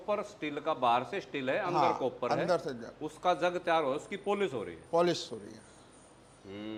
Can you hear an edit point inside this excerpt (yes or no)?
no